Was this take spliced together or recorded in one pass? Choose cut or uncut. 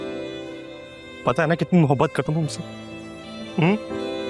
uncut